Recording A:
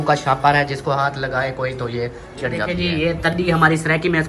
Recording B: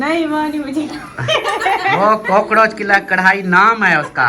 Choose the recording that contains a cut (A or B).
A